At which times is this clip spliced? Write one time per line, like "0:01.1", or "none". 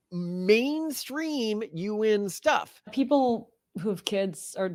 none